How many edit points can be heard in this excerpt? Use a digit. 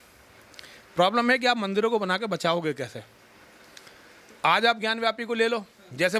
0